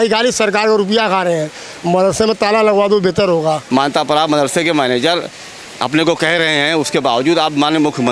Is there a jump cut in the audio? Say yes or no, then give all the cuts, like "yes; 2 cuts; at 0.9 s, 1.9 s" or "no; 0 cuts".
yes; 1 cut; at 3.6 s